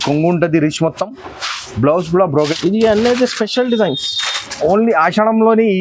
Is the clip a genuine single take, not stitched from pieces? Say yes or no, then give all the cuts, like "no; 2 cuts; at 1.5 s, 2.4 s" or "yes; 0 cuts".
no; 1 cut; at 2.5 s